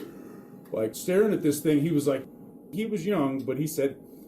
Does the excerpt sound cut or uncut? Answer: cut